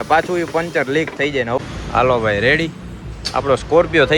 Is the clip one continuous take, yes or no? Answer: no